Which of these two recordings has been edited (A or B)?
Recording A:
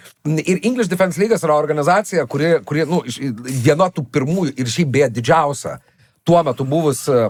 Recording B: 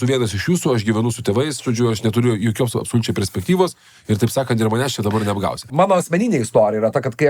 B